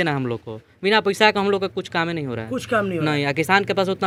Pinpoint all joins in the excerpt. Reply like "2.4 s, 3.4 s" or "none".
none